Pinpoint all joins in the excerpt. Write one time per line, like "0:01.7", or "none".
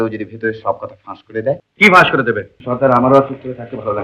0:01.7
0:02.5